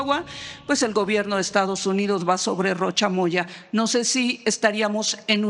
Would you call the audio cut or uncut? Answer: uncut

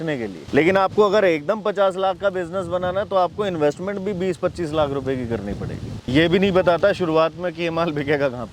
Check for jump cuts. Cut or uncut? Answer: cut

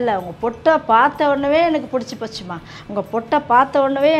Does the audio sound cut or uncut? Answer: uncut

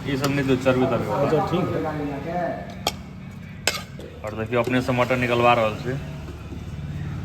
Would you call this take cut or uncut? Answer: cut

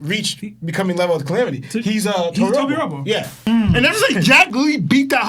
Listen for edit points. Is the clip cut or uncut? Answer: cut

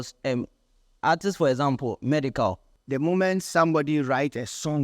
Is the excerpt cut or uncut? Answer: cut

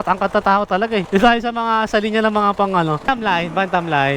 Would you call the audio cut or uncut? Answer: cut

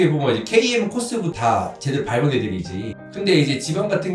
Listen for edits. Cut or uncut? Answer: cut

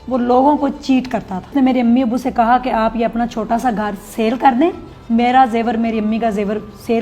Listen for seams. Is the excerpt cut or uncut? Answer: cut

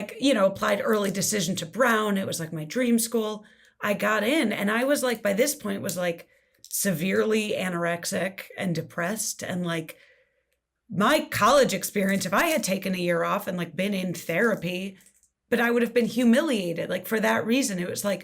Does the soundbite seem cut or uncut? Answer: uncut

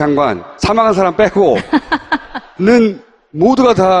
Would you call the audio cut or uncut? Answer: cut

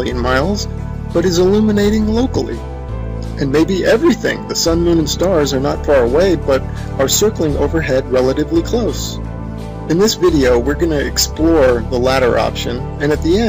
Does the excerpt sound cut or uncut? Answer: uncut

